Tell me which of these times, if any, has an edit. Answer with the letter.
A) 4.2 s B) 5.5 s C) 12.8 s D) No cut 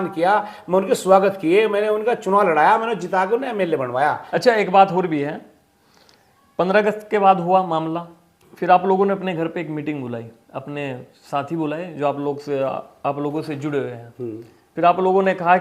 A